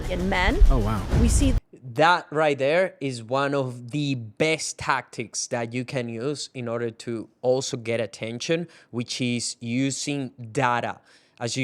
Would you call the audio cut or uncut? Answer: uncut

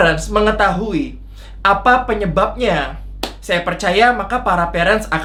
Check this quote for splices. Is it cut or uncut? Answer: uncut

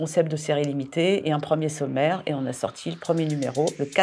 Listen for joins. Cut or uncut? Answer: uncut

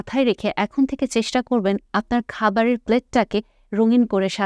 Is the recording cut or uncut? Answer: uncut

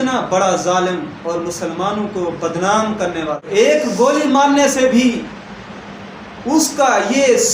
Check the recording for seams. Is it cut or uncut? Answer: cut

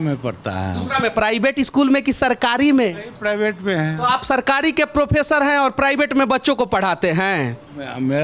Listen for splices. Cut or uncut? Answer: uncut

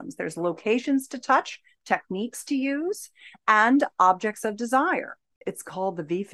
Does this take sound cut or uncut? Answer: cut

